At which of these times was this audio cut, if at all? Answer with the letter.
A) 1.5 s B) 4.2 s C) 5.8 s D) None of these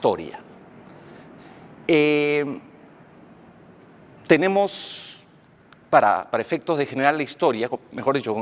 C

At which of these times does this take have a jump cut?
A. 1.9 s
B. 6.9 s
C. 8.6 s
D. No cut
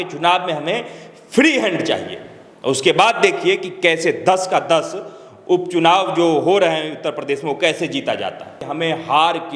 C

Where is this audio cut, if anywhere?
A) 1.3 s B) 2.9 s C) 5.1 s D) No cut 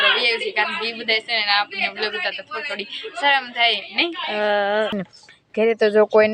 C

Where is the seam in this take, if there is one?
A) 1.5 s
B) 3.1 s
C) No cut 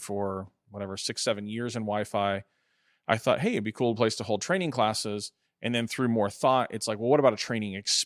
C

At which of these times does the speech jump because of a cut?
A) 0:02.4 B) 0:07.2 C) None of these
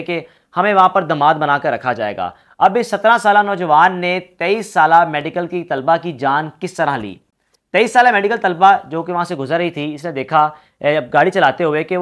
C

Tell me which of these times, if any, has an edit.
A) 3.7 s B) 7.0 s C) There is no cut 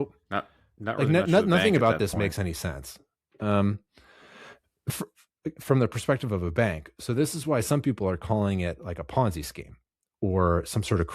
C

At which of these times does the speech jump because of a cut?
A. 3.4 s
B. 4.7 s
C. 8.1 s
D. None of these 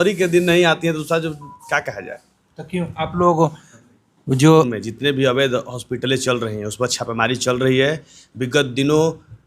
B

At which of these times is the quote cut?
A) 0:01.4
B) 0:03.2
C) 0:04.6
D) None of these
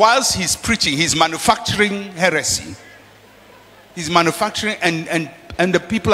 D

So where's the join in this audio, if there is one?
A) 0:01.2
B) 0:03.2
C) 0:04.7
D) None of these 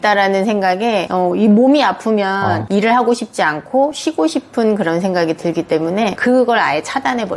D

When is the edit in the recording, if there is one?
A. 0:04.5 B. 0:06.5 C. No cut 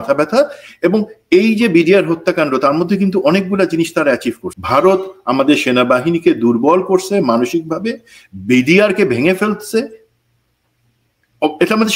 A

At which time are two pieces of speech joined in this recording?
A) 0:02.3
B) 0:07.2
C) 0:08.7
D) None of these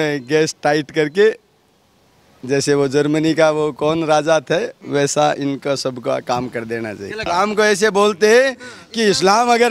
B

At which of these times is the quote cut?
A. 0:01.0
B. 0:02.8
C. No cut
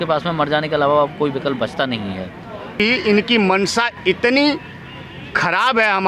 B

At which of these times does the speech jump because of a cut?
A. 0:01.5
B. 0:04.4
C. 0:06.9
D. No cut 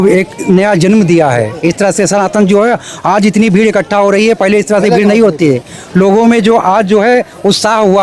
D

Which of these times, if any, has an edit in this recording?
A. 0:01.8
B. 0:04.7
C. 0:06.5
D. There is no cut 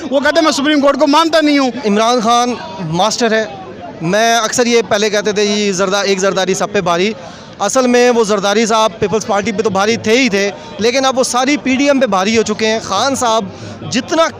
A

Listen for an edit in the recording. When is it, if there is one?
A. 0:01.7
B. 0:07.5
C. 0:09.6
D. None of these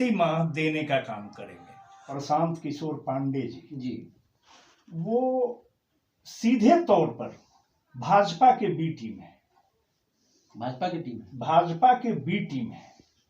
A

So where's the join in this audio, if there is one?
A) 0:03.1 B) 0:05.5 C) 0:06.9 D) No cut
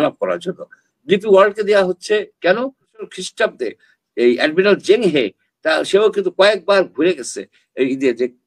A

